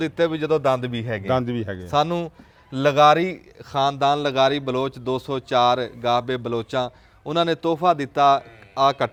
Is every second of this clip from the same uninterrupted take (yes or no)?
yes